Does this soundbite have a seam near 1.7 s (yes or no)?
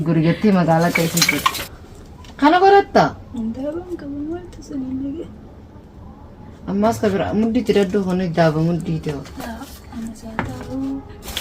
yes